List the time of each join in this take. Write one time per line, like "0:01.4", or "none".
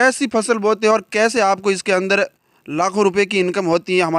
none